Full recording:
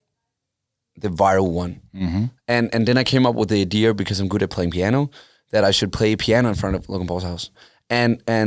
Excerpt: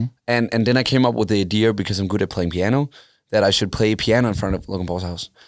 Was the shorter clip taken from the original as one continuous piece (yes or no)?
yes